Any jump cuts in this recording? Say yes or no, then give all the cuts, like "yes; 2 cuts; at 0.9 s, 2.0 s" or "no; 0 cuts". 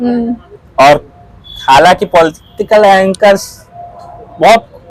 no; 0 cuts